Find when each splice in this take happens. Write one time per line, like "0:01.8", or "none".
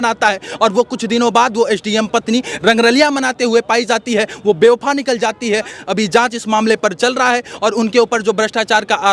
none

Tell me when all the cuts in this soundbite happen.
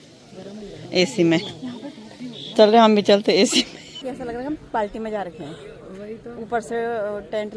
0:04.0

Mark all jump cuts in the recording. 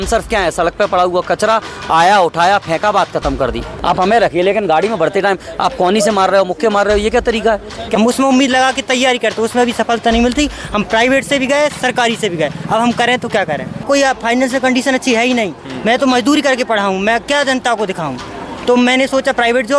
0:03.7
0:07.8
0:13.8

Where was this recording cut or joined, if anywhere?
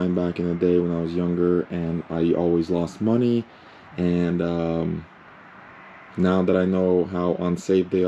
none

